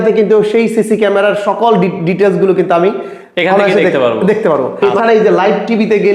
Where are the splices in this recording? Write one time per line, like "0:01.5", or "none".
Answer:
0:04.7